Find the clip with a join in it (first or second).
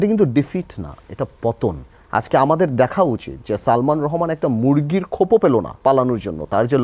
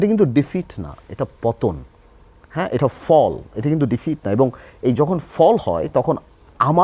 first